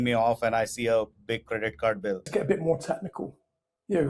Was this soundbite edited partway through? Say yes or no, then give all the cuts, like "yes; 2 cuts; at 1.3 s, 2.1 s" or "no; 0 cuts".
yes; 1 cut; at 2.3 s